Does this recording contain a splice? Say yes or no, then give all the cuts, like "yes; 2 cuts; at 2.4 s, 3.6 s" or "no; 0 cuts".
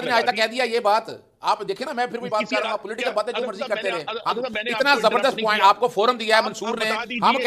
no; 0 cuts